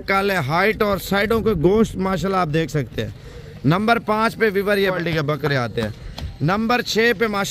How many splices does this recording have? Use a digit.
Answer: 1